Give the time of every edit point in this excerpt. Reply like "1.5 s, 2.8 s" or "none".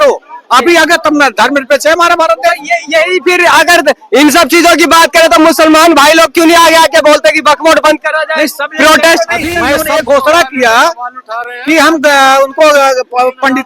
9.8 s